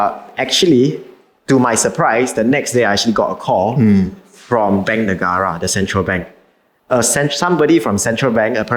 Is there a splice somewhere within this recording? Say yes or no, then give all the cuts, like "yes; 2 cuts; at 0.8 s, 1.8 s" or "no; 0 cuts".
no; 0 cuts